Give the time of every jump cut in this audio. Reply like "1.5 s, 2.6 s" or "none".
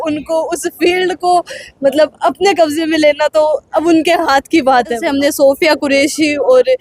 5.0 s